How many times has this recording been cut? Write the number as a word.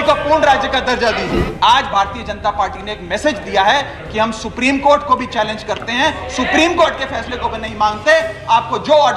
one